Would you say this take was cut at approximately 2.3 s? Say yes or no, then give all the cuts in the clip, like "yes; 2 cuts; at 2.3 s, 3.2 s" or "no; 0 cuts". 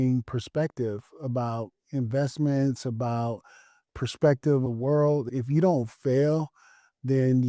no; 2 cuts; at 3.7 s, 5.0 s